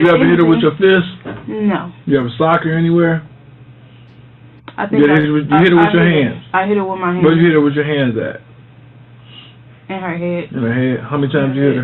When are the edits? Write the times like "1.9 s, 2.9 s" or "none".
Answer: none